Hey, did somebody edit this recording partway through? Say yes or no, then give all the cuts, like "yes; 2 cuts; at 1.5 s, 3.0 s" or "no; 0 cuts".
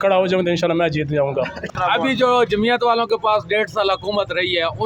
yes; 1 cut; at 1.8 s